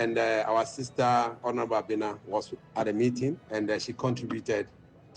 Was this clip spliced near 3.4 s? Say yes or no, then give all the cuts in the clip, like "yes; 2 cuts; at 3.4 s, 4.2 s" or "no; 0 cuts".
yes; 1 cut; at 3.4 s